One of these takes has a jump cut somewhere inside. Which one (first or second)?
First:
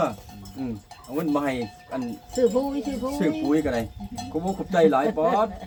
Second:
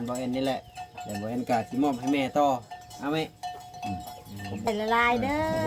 second